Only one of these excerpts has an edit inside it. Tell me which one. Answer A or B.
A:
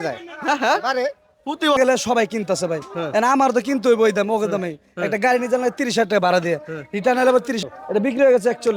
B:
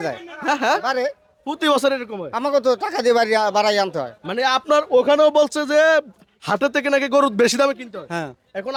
A